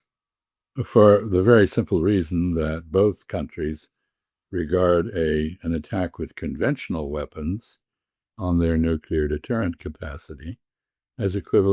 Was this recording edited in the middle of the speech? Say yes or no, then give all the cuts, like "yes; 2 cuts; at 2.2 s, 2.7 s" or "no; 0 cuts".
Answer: no; 0 cuts